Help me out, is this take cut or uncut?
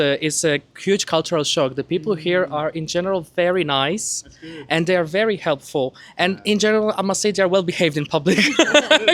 uncut